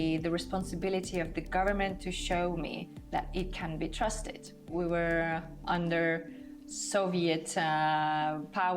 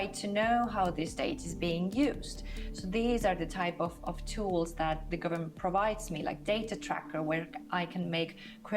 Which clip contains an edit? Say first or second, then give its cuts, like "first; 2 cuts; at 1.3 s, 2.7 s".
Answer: first; 1 cut; at 4.7 s